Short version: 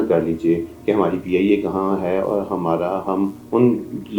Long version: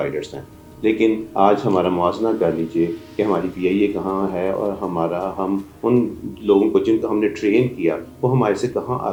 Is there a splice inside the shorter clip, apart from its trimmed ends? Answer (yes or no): no